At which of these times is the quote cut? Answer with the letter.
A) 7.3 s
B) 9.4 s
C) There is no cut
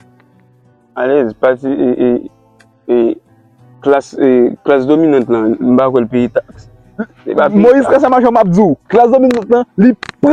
C